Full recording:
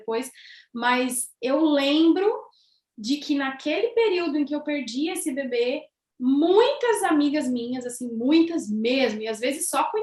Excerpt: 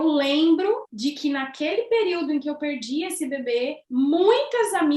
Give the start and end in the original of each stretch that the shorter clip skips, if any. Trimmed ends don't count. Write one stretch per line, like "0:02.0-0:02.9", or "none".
0:02.5-0:02.9
0:05.9-0:06.1